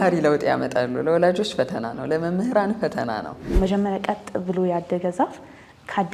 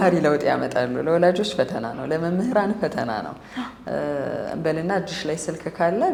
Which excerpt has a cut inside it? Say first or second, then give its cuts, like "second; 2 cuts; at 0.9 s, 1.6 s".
first; 1 cut; at 3.5 s